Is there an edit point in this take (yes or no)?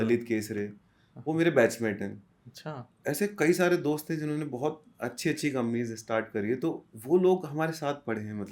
no